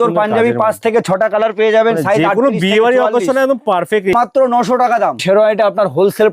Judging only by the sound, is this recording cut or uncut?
cut